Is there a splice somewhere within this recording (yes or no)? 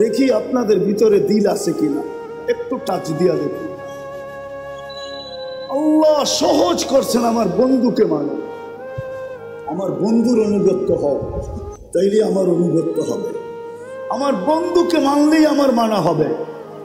yes